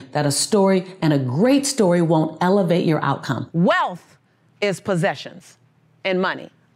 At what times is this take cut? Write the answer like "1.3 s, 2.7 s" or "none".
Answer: 3.4 s